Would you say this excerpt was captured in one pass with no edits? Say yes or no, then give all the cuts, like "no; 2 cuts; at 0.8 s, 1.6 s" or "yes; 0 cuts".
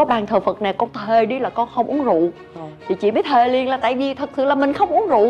yes; 0 cuts